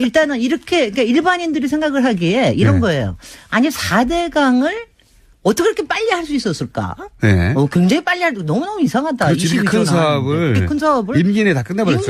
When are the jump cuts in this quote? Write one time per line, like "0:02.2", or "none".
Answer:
0:07.3